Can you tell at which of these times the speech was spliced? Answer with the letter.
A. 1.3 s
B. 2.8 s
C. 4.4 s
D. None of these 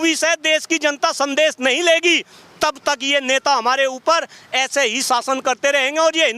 D